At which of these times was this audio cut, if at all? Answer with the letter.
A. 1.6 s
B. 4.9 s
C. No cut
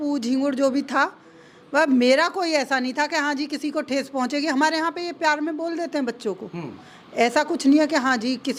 C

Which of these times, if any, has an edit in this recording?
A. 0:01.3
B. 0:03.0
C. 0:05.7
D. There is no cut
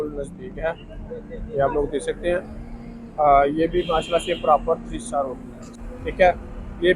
C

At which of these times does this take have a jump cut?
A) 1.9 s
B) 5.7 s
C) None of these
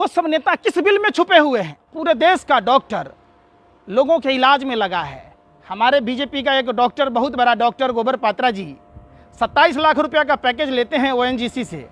A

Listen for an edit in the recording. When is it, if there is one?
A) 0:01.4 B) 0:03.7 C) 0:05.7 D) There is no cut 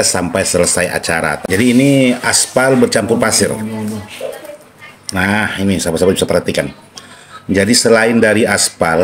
A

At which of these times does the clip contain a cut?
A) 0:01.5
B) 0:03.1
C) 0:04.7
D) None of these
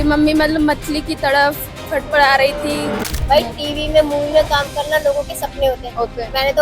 B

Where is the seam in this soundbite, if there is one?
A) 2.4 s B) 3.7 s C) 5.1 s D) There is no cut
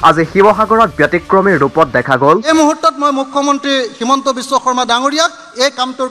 A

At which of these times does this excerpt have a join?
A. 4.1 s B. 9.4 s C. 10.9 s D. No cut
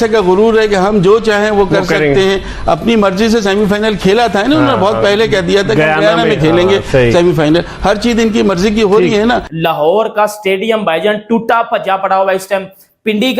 B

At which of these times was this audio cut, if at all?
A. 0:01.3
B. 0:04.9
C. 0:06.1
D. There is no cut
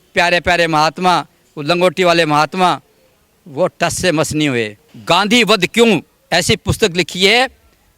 B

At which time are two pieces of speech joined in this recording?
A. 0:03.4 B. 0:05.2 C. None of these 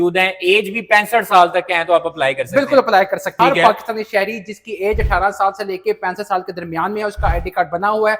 A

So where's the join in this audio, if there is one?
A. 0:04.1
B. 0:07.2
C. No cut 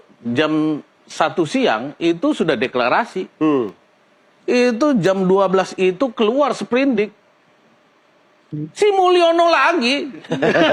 C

